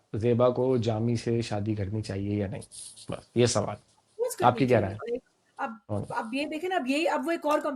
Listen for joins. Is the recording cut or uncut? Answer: uncut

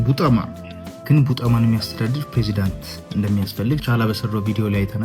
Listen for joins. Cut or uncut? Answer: cut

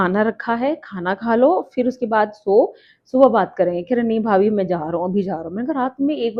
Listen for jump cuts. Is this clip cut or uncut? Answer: uncut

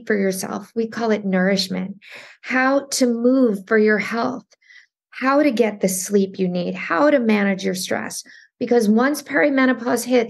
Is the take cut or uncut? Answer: uncut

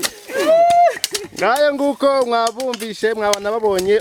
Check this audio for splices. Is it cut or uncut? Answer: uncut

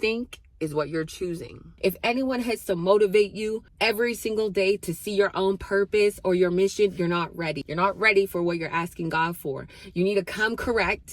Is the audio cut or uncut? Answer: cut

